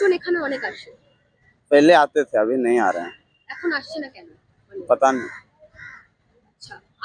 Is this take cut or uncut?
uncut